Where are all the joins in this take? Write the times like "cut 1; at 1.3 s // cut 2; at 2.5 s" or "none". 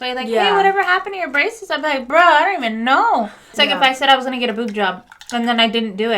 cut 1; at 3.5 s